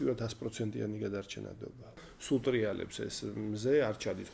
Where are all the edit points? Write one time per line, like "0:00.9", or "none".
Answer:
0:02.1